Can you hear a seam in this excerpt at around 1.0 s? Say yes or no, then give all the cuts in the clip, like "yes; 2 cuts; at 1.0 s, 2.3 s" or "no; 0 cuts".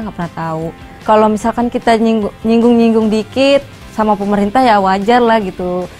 yes; 1 cut; at 1.0 s